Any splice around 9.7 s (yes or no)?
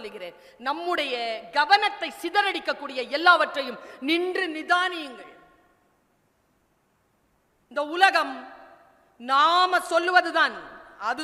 no